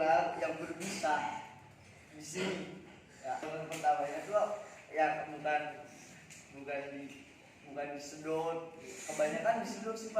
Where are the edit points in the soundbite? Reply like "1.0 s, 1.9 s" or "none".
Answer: 3.5 s